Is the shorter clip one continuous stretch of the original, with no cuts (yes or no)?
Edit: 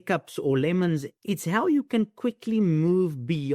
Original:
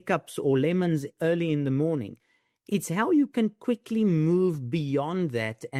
no